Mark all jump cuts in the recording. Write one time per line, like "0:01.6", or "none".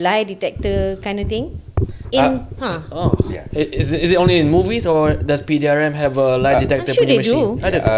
none